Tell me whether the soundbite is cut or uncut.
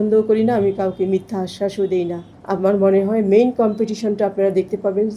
cut